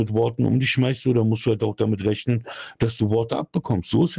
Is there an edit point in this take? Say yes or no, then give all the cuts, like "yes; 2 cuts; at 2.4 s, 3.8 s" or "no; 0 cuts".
no; 0 cuts